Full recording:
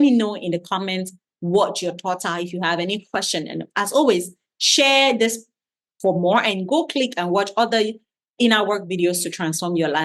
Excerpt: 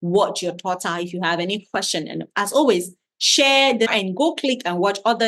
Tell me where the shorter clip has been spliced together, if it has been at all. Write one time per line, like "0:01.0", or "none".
0:03.9